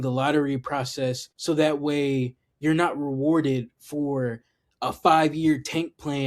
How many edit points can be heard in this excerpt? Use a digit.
1